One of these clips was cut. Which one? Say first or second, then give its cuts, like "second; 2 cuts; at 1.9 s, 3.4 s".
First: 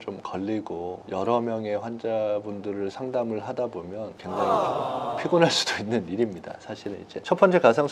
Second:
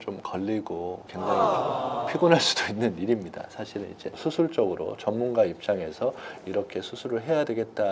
second; 2 cuts; at 1.0 s, 4.1 s